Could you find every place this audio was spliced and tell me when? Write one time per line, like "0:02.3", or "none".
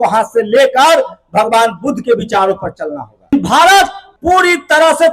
0:03.3
0:04.1